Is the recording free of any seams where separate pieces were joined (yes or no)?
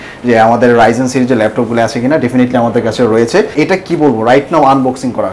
no